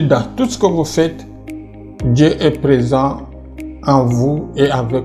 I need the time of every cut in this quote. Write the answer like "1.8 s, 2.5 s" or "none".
none